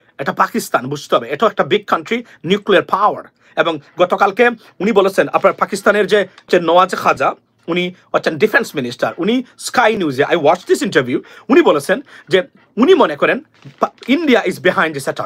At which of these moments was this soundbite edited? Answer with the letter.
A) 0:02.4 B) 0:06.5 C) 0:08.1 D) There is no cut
B